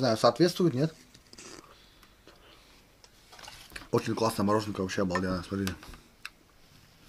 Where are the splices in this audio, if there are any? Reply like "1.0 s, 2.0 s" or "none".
3.5 s